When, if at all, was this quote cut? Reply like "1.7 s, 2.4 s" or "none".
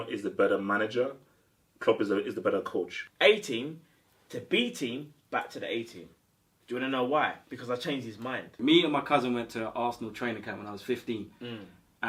3.0 s, 8.6 s